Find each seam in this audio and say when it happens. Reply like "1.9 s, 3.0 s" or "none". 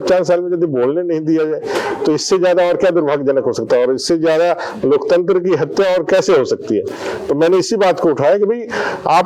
none